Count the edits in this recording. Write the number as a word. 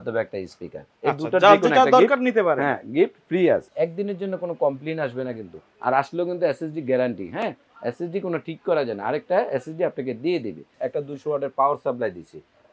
two